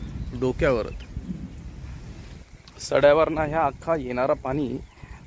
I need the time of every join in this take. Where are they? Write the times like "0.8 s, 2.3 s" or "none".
2.2 s